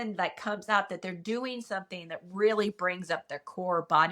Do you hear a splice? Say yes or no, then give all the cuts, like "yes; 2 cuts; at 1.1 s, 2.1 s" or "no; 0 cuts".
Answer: no; 0 cuts